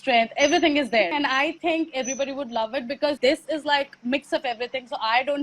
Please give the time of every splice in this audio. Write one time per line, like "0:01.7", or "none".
0:01.1
0:03.2